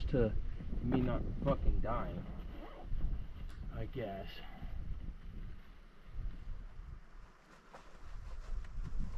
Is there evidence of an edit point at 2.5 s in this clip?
no; 0 cuts

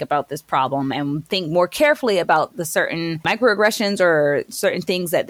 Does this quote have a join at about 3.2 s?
yes; 1 cut; at 3.2 s

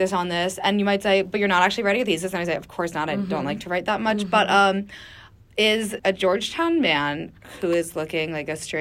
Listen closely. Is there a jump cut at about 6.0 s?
yes; 1 cut; at 6.0 s

